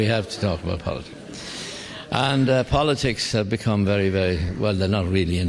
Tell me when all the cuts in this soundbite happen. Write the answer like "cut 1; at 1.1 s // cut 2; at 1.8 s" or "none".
none